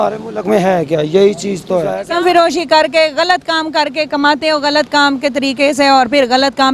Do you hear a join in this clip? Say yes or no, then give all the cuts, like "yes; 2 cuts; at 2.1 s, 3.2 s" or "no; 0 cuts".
yes; 1 cut; at 1.9 s